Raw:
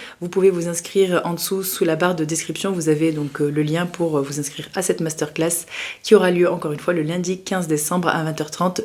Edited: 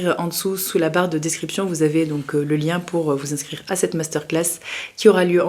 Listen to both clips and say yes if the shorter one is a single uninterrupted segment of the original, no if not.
yes